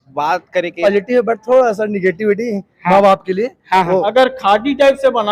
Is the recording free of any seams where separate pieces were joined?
no; 2 cuts; at 0.8 s, 4.1 s

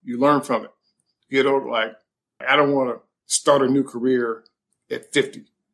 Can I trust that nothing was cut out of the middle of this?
no; 1 cut; at 2.4 s

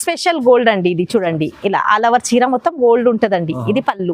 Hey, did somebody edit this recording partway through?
no; 0 cuts

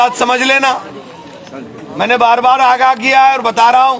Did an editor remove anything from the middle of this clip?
no; 0 cuts

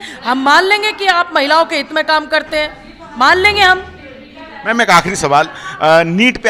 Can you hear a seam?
no; 0 cuts

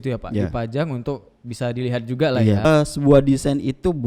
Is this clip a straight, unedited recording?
no; 1 cut; at 2.6 s

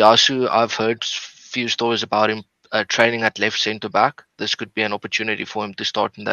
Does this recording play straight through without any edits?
yes; 0 cuts

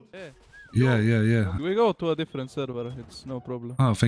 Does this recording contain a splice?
yes; 1 cut; at 1.6 s

